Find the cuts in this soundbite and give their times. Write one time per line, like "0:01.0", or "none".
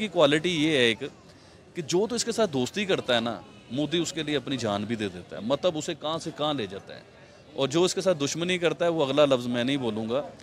none